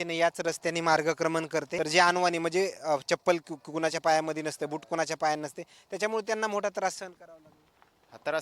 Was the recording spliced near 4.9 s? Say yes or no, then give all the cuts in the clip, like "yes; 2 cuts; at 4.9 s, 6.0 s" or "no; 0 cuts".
no; 1 cut; at 1.7 s